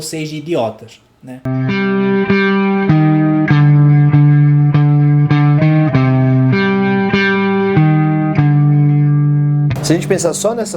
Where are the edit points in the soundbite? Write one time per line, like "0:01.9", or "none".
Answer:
0:01.5

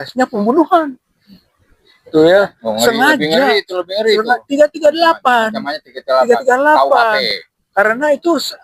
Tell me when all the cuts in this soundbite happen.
none

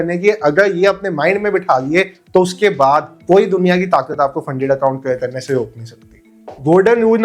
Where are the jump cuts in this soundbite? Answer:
none

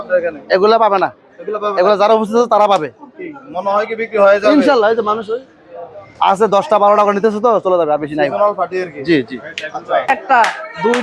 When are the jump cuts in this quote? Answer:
0:10.1

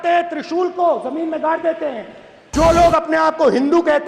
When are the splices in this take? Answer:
0:02.5

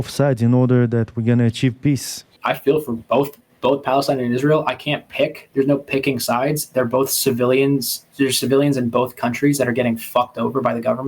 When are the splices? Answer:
0:02.3
0:03.4

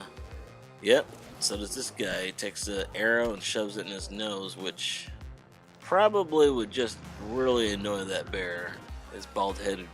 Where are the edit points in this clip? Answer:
0:08.8

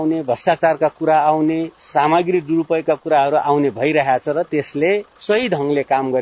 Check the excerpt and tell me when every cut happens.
0:01.8
0:05.1

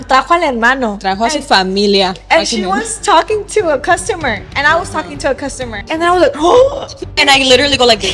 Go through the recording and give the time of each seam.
0:05.8
0:07.2

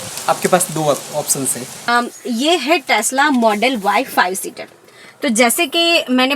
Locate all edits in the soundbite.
0:01.9

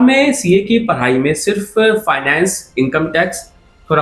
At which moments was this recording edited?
none

